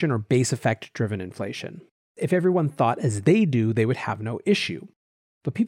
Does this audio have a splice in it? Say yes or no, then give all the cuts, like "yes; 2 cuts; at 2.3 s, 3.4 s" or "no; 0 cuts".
yes; 1 cut; at 2.1 s